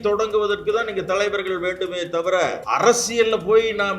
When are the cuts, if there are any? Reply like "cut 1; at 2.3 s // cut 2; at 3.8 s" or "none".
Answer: cut 1; at 2.6 s